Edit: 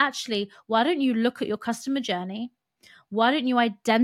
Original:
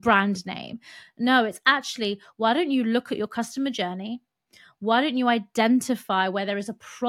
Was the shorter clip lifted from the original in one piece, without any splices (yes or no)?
yes